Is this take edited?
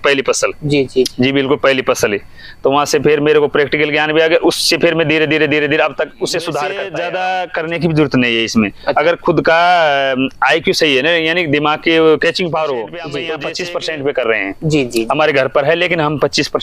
yes; 2 cuts; at 6.8 s, 13.3 s

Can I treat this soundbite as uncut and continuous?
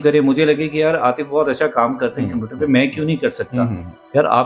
yes; 0 cuts

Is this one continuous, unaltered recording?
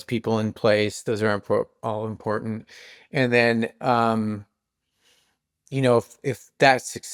yes; 0 cuts

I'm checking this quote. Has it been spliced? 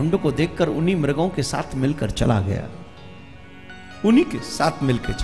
no; 0 cuts

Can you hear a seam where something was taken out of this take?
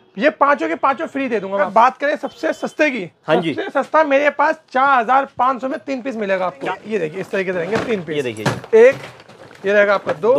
yes; 2 cuts; at 1.7 s, 6.6 s

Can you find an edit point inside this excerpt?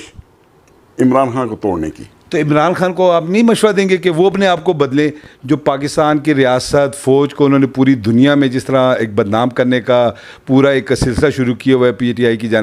no; 0 cuts

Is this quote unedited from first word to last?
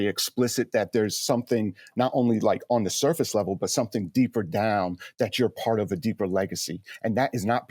yes; 0 cuts

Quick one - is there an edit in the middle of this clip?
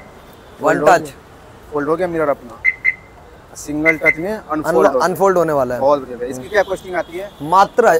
no; 0 cuts

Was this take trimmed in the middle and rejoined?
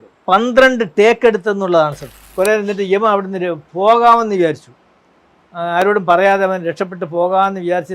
yes; 1 cut; at 2.2 s

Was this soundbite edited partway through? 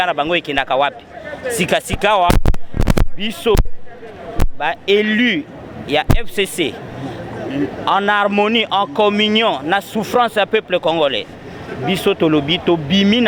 no; 0 cuts

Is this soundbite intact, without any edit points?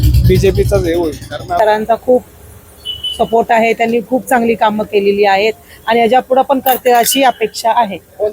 no; 1 cut; at 1.5 s

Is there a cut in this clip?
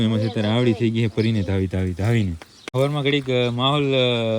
yes; 1 cut; at 2.5 s

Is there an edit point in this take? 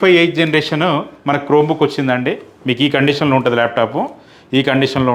no; 0 cuts

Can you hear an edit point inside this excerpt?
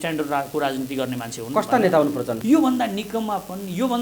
yes; 1 cut; at 2.3 s

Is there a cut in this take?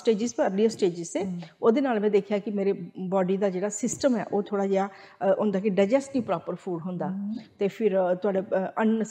no; 0 cuts

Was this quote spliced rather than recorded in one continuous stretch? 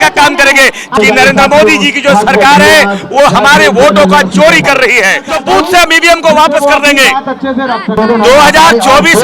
yes; 3 cuts; at 0.9 s, 5.3 s, 8.0 s

